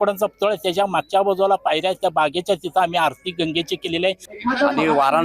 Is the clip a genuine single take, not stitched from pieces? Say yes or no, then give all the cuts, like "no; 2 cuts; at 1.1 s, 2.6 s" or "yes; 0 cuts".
no; 1 cut; at 4.3 s